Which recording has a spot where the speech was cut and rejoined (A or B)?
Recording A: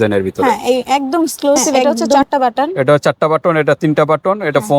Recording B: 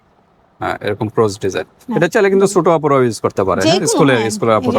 A